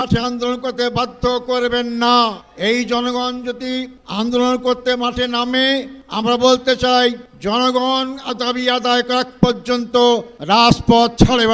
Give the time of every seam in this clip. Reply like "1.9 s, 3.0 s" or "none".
none